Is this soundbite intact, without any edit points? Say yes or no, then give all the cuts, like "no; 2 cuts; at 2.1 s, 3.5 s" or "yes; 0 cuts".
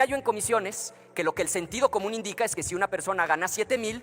yes; 0 cuts